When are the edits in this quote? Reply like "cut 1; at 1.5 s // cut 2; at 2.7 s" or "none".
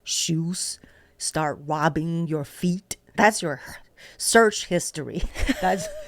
cut 1; at 3.1 s